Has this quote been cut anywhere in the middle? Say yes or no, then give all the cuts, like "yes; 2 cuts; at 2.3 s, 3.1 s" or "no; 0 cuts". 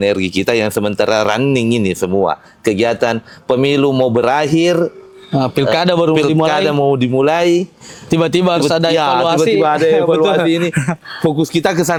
no; 0 cuts